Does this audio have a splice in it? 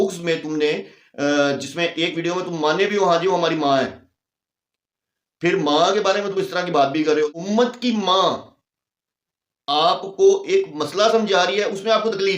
yes; 1 cut; at 7.3 s

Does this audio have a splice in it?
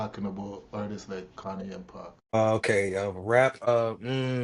yes; 2 cuts; at 2.3 s, 3.7 s

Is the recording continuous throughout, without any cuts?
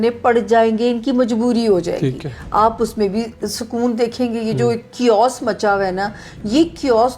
yes; 0 cuts

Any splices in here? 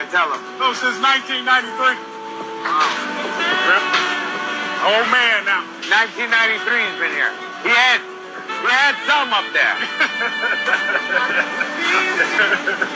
yes; 2 cuts; at 9.4 s, 11.8 s

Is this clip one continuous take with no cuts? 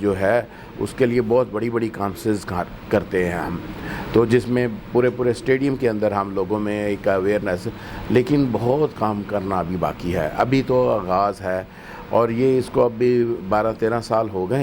yes; 0 cuts

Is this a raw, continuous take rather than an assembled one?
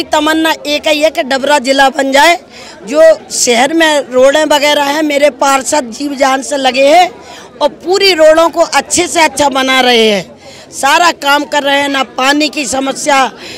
yes; 0 cuts

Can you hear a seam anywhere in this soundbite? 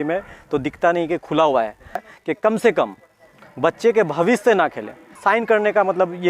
yes; 2 cuts; at 2.1 s, 5.1 s

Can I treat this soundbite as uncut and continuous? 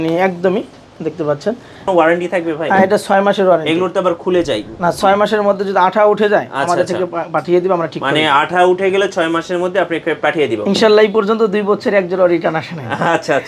no; 1 cut; at 1.9 s

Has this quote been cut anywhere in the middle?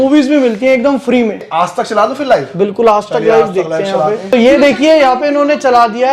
yes; 1 cut; at 1.3 s

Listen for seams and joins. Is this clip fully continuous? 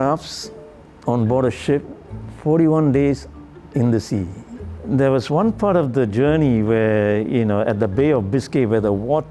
yes; 0 cuts

